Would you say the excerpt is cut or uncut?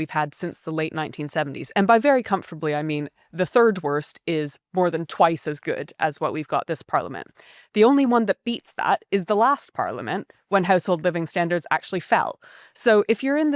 cut